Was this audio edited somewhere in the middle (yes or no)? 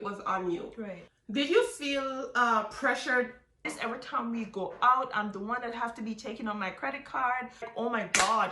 yes